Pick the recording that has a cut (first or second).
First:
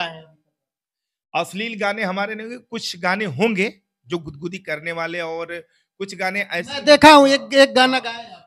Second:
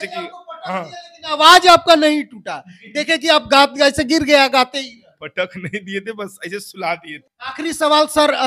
second